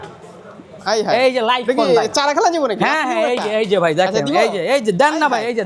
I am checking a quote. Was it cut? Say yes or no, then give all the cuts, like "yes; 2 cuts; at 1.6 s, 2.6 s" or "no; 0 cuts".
no; 0 cuts